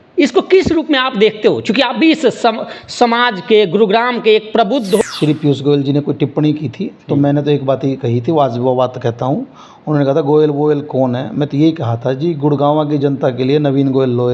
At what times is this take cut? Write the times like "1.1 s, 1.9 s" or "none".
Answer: 5.0 s